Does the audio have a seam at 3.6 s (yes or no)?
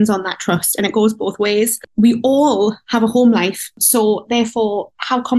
yes